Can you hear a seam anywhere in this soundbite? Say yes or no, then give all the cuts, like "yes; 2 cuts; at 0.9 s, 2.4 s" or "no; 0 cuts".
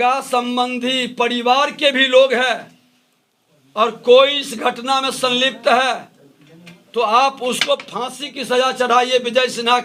no; 0 cuts